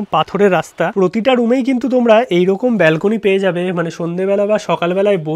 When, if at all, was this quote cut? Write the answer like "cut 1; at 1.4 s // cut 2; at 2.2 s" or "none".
cut 1; at 0.9 s